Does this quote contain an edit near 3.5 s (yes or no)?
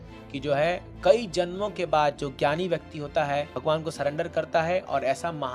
yes